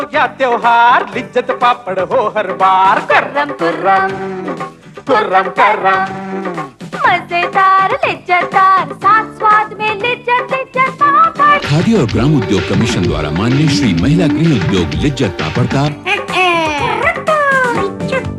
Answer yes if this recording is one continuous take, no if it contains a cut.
yes